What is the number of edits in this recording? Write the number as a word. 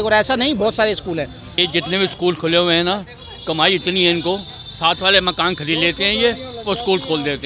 one